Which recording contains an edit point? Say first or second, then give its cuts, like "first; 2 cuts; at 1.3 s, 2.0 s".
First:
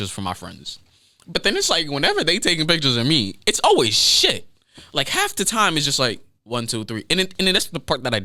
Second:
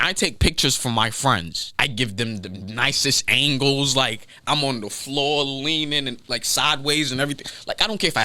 second; 1 cut; at 1.6 s